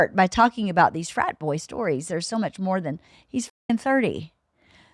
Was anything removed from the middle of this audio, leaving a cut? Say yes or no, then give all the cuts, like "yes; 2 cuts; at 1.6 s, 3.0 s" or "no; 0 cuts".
no; 0 cuts